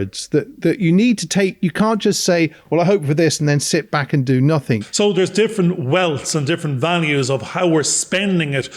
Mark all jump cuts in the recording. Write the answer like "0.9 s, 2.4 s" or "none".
4.9 s